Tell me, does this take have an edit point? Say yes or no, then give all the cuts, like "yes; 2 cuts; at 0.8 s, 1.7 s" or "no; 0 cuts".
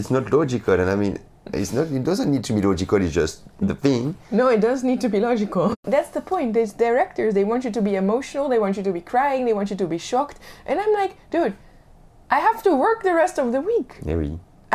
yes; 1 cut; at 5.8 s